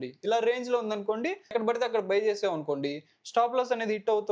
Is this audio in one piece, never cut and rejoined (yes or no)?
no